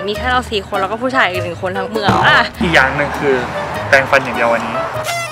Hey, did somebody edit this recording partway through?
yes; 1 cut; at 2.5 s

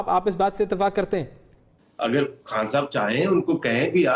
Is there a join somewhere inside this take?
yes; 1 cut; at 1.7 s

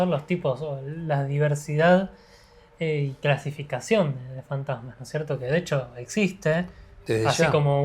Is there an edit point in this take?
no; 0 cuts

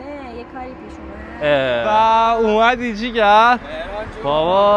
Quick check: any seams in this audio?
yes; 1 cut; at 1.8 s

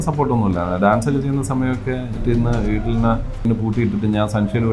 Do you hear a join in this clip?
yes; 2 cuts; at 2.2 s, 3.4 s

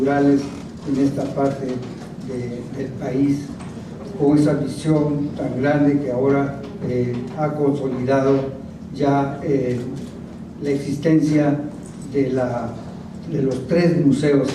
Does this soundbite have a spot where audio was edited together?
yes; 1 cut; at 7.3 s

